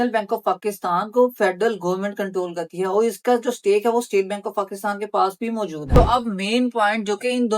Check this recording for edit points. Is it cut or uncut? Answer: cut